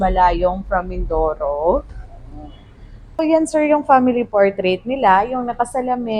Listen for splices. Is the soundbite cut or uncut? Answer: cut